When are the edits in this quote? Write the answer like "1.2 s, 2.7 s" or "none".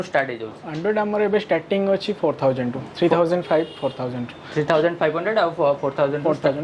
none